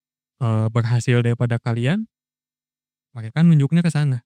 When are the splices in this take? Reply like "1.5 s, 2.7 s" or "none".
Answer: none

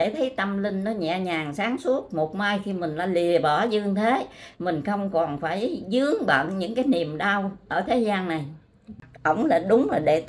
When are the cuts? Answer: 9.1 s

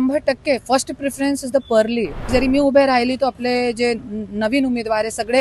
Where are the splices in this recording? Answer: 2.3 s

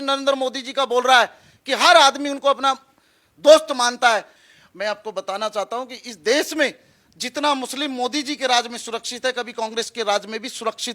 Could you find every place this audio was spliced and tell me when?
4.3 s

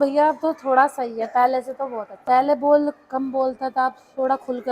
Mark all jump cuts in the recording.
2.2 s

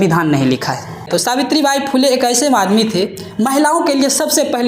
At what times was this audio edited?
1.1 s

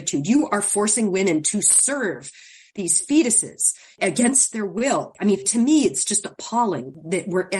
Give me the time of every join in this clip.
5.1 s

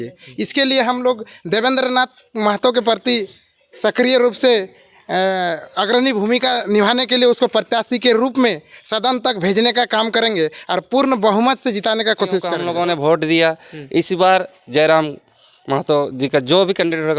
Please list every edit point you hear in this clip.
12.6 s

